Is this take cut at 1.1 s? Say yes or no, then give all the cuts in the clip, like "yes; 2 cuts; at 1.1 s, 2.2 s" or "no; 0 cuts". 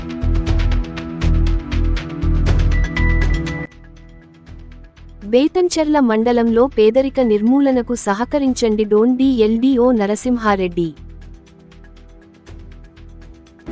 yes; 1 cut; at 1.1 s